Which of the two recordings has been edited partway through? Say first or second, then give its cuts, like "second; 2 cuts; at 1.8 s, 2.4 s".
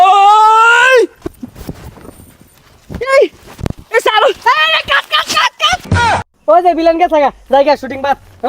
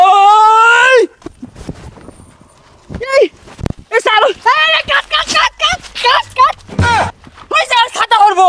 first; 1 cut; at 6.0 s